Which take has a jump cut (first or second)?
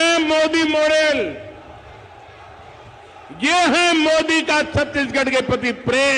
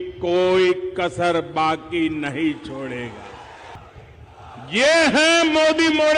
second